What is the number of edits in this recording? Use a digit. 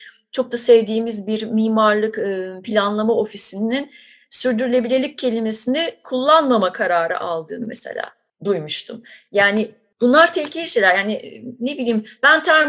2